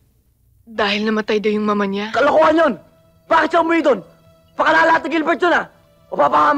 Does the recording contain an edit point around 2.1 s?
yes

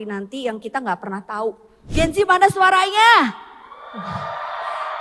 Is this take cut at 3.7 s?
no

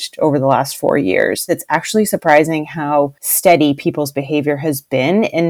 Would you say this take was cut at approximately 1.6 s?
yes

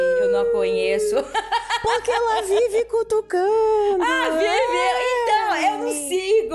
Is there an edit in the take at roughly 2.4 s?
no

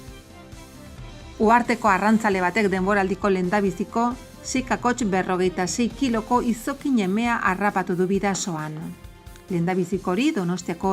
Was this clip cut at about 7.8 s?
no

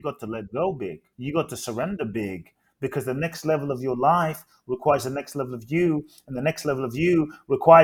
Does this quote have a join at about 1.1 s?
yes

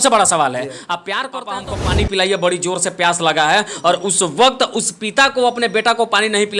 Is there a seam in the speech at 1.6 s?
yes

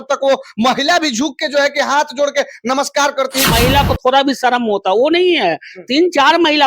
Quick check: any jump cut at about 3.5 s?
yes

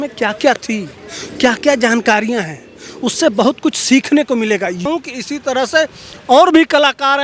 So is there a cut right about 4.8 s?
yes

